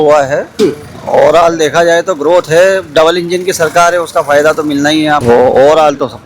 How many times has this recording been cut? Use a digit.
1